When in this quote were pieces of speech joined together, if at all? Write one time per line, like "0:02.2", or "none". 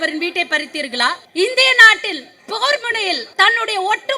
0:01.2
0:03.3